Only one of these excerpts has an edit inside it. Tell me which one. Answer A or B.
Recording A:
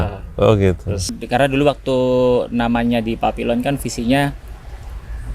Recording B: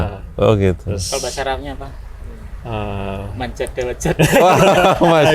A